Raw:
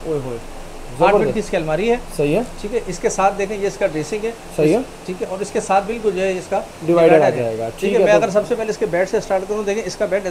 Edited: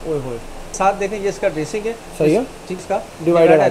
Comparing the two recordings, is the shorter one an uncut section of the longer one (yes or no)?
no